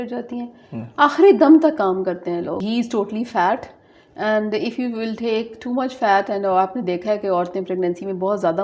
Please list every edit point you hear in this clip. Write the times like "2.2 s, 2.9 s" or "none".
2.6 s